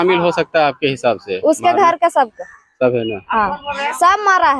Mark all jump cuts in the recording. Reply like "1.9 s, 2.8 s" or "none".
none